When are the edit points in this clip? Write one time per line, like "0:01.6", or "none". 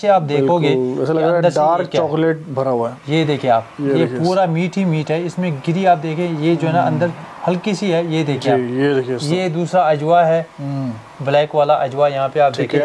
none